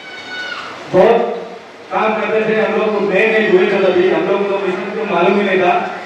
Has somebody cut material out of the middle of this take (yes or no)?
no